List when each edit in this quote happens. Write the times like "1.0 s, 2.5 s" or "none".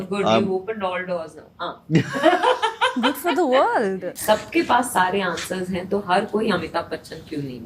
4.1 s